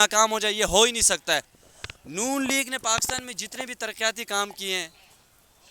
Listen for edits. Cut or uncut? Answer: cut